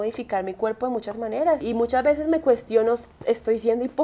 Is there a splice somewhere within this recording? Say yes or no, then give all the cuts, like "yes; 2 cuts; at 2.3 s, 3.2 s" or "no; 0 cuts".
no; 0 cuts